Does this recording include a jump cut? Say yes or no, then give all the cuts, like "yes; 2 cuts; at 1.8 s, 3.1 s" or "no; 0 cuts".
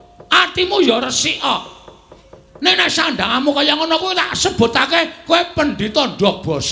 no; 0 cuts